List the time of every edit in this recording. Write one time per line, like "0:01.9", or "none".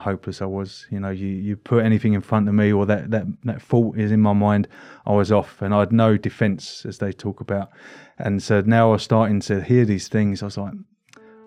none